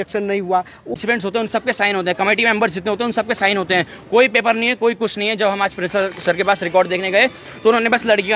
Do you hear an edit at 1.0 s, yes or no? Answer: yes